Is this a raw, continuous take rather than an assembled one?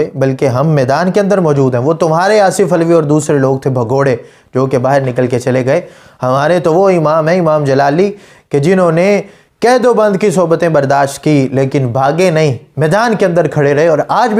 yes; 0 cuts

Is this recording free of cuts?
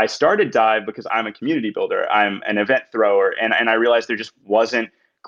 no; 1 cut; at 1.0 s

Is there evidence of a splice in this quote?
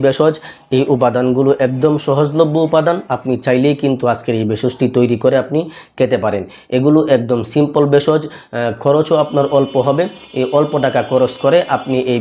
no; 0 cuts

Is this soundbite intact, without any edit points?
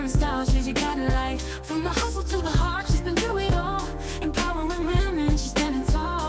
yes; 0 cuts

